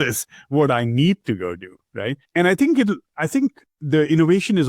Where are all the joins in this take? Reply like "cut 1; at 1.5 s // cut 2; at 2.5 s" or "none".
cut 1; at 2.2 s